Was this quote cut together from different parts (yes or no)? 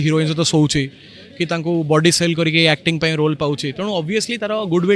no